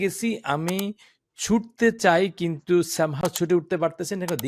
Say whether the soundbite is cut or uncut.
uncut